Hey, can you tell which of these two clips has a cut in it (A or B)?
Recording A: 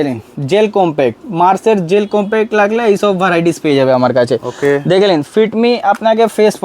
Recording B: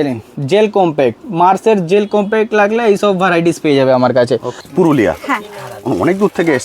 B